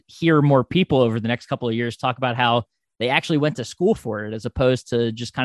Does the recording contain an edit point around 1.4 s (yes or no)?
no